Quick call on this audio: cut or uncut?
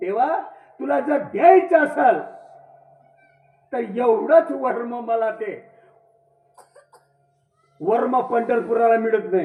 uncut